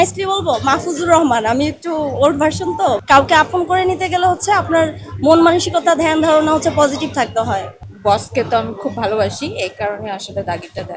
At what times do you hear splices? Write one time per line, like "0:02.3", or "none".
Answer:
0:03.0
0:07.7

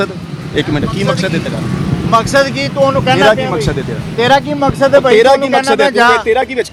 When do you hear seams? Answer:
none

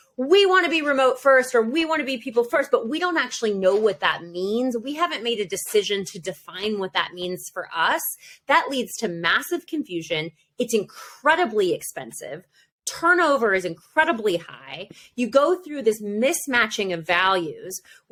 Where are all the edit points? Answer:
none

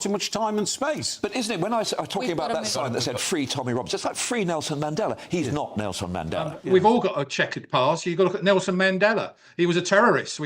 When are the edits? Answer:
0:06.5

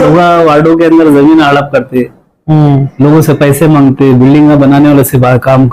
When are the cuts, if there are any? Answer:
none

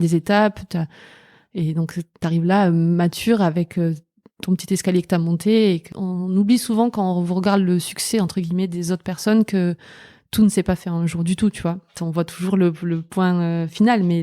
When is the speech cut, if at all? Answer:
0:05.9
0:12.0

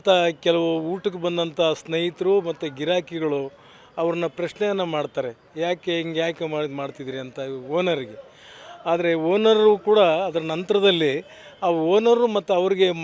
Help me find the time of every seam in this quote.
none

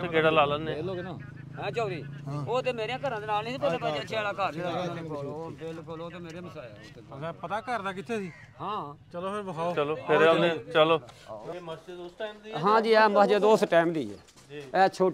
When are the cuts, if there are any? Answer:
0:11.4

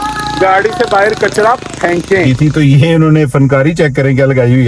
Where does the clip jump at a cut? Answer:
0:02.3

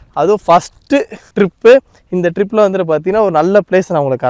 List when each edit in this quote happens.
0:01.2

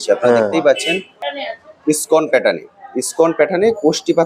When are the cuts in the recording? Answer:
0:01.2

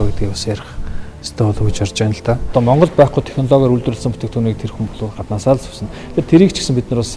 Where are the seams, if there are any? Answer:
0:02.4

